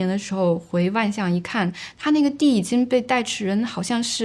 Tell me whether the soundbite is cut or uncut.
uncut